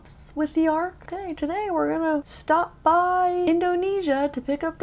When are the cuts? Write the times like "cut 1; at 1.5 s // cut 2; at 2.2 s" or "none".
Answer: cut 1; at 1.1 s // cut 2; at 2.3 s // cut 3; at 3.4 s